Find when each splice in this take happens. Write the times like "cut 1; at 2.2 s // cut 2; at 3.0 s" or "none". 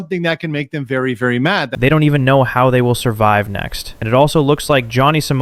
none